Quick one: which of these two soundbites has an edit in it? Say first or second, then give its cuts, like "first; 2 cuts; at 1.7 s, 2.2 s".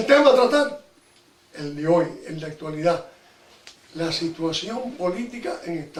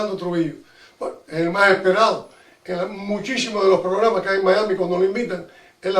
second; 1 cut; at 3.6 s